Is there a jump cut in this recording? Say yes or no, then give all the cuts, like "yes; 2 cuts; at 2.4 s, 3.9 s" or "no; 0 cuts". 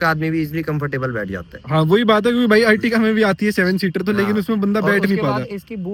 no; 0 cuts